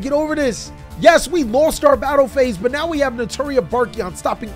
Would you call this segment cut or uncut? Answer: uncut